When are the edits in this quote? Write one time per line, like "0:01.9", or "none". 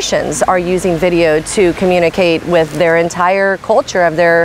none